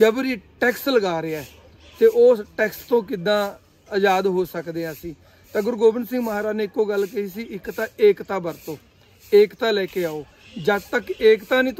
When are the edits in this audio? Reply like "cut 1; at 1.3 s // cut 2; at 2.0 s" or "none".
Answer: none